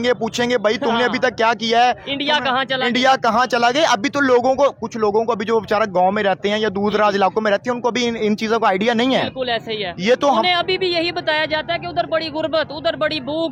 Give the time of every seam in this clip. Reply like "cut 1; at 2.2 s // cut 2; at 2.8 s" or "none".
none